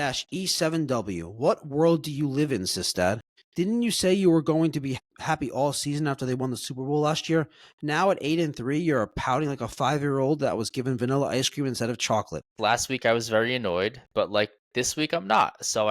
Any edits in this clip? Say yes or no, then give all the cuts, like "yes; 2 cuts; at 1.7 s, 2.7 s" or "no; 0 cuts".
yes; 3 cuts; at 3.4 s, 5.0 s, 12.6 s